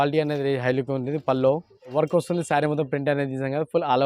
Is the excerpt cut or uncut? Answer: cut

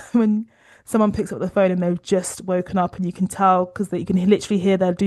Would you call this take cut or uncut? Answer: uncut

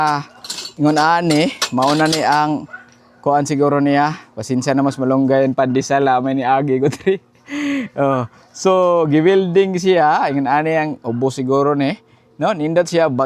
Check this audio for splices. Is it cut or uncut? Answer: uncut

